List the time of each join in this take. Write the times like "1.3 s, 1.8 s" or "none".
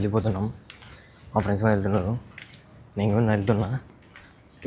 none

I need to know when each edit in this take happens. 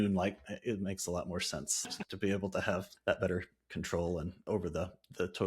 2.0 s, 2.9 s, 4.4 s

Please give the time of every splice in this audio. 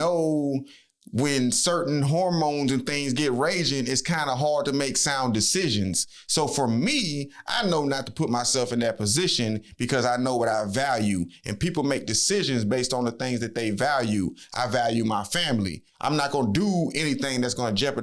15.8 s

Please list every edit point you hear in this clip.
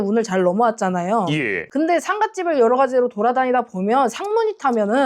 1.6 s

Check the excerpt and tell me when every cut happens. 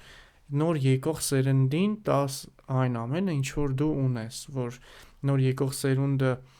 none

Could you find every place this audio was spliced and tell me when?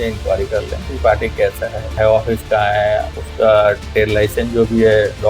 2.0 s, 3.2 s

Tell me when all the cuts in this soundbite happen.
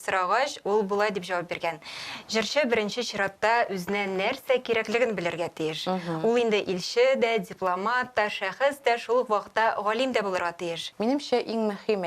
10.8 s

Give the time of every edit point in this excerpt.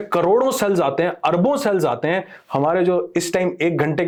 none

